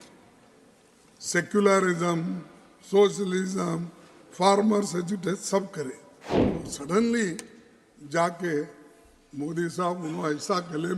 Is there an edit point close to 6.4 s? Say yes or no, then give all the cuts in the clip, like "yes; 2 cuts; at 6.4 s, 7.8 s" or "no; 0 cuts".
yes; 1 cut; at 6.4 s